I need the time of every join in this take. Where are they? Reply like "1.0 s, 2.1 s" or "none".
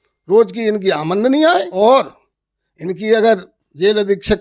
1.7 s